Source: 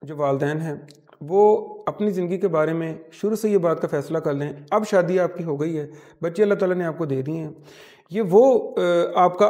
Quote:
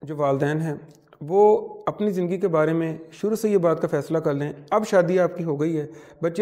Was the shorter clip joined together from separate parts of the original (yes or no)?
no